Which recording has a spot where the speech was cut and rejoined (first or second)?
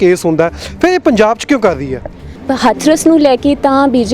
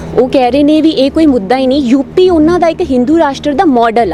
first